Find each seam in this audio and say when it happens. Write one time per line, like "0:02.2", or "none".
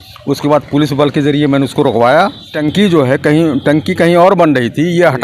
0:02.6